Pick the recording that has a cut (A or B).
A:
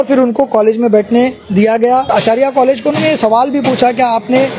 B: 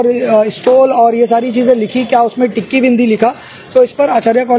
A